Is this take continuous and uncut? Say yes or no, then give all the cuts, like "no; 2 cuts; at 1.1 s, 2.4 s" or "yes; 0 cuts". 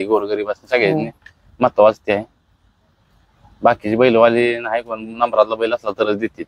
yes; 0 cuts